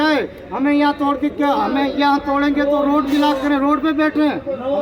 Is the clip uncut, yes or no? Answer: yes